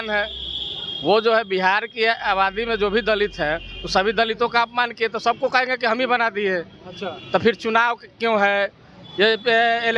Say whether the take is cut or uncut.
uncut